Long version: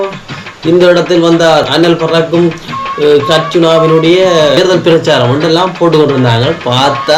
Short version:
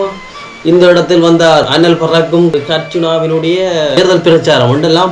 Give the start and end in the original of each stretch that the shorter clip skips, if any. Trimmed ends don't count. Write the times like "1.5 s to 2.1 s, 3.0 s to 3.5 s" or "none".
2.5 s to 3.1 s